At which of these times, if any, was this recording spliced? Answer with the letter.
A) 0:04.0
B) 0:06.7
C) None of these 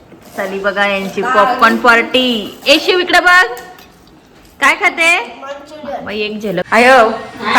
B